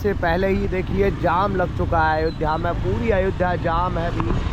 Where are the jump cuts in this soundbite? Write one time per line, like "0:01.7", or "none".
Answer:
none